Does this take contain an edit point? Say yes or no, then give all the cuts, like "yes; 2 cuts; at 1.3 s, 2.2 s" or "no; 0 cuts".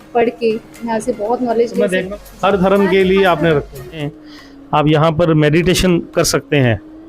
yes; 2 cuts; at 2.0 s, 4.1 s